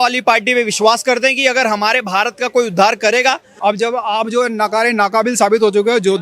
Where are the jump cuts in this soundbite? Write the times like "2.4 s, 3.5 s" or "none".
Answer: 3.5 s